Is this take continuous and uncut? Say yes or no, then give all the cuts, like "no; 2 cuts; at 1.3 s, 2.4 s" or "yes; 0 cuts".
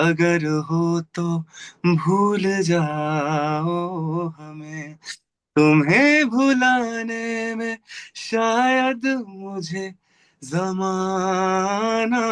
yes; 0 cuts